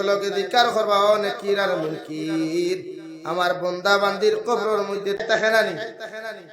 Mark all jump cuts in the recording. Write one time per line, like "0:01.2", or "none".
0:05.2